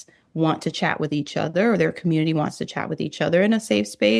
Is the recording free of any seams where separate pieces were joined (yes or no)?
yes